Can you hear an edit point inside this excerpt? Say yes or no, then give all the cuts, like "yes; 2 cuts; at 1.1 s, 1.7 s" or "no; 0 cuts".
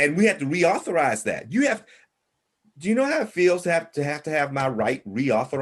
no; 0 cuts